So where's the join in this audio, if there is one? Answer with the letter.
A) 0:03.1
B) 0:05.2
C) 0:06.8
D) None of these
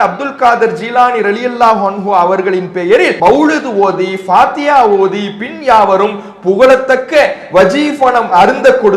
A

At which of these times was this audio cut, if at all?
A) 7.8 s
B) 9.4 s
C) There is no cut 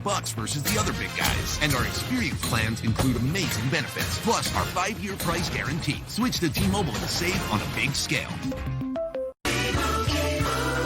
B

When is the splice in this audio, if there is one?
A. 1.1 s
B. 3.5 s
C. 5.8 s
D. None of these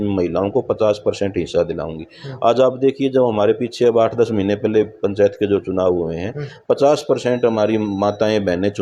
D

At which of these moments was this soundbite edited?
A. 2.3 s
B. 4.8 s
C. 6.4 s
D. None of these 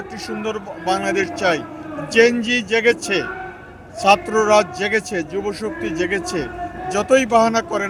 D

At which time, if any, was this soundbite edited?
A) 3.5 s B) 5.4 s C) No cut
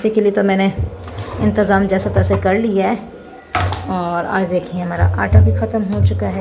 C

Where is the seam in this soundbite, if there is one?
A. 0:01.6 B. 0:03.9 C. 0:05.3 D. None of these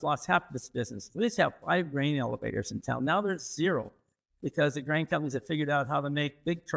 D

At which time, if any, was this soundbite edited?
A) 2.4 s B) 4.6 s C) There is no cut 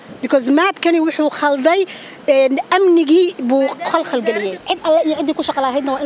B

